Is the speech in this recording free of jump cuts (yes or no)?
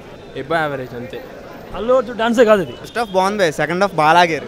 no